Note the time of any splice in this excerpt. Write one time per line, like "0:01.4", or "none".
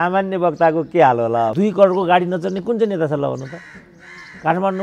0:01.5

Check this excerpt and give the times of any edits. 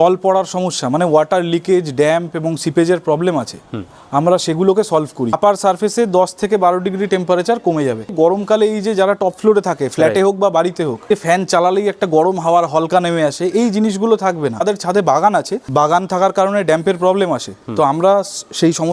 0:05.4
0:08.1
0:11.1
0:14.6
0:15.6

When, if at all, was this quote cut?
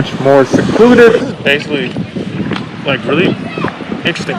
0:01.2

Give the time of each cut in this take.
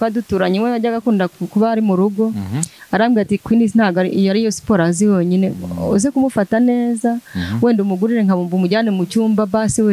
none

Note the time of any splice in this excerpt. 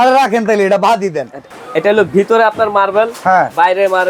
0:01.4

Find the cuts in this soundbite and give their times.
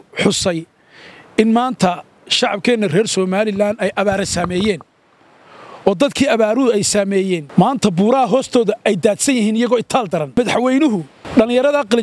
0:07.4
0:10.4
0:11.2

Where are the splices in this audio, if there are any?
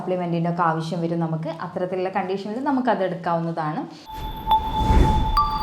0:04.1

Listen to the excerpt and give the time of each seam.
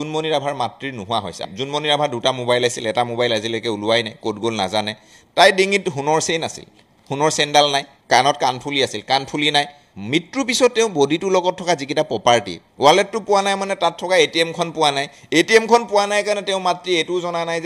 0:01.5
0:09.9
0:12.6

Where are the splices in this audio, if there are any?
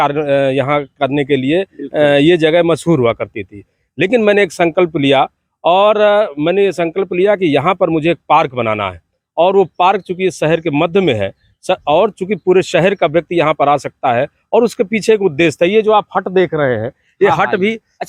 none

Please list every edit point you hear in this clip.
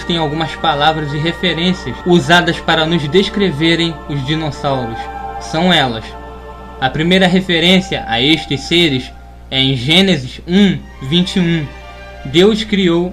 0:02.2

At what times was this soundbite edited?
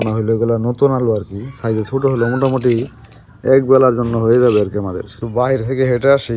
none

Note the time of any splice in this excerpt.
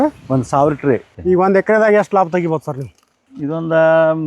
0:01.1

